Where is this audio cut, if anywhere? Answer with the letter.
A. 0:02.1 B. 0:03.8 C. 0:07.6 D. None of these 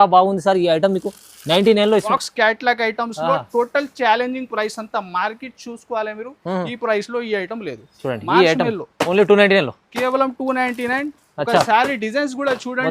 A